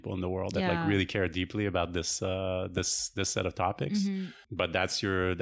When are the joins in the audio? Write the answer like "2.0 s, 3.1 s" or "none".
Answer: 4.4 s